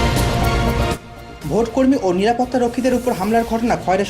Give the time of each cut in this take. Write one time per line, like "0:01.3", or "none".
none